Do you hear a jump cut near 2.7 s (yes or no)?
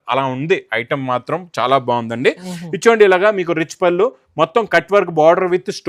no